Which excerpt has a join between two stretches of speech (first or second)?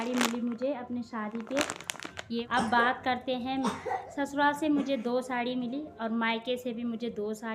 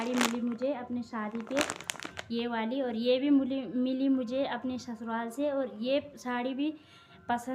first